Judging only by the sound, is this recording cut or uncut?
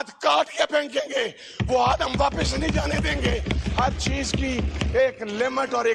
uncut